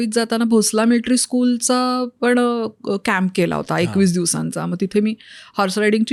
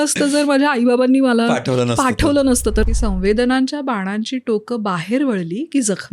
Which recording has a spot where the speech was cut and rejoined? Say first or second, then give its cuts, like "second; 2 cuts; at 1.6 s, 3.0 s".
second; 1 cut; at 2.9 s